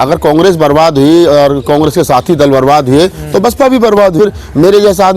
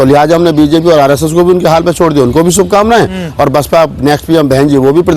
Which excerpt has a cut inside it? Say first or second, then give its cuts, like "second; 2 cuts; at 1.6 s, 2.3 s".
first; 1 cut; at 4.2 s